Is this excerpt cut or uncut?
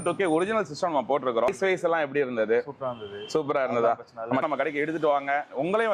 cut